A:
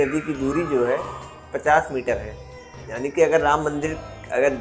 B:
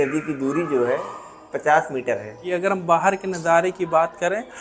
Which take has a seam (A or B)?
B